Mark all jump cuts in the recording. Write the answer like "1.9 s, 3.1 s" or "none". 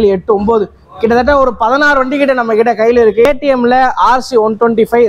3.3 s